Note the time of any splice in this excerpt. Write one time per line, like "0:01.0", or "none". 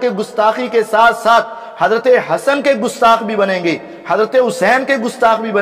none

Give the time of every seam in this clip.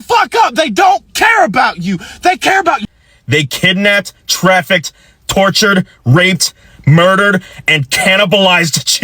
0:02.9

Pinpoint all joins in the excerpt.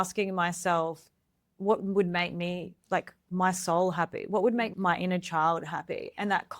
0:01.5
0:04.7

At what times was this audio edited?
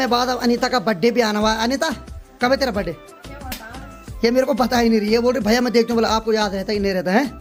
none

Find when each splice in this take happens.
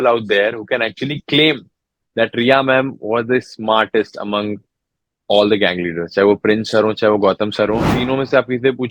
0:07.9

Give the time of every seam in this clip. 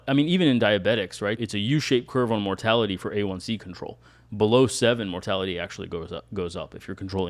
0:01.4

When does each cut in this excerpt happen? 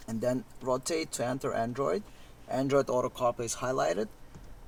none

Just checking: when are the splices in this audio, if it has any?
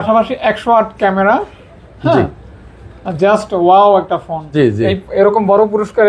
0:04.4

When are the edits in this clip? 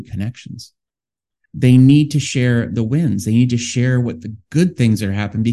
0:01.0

